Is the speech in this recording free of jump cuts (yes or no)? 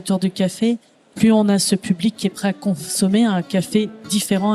yes